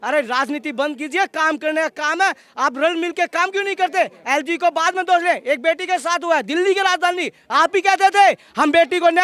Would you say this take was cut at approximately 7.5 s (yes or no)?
yes